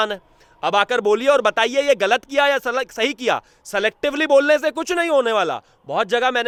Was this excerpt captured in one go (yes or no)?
yes